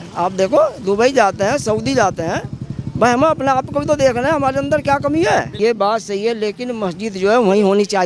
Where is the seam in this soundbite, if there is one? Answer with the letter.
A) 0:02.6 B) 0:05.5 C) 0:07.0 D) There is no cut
B